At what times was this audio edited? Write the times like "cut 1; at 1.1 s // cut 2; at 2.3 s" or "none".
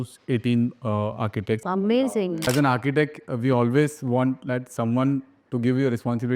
cut 1; at 2.5 s